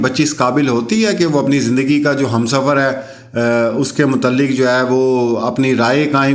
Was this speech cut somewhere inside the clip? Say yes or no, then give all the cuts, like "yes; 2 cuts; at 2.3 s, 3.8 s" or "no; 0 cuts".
no; 0 cuts